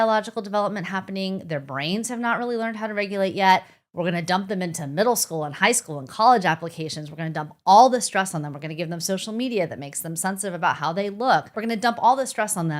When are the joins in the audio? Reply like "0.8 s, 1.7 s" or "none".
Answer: 11.6 s